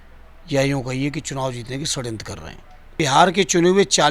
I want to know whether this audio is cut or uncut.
cut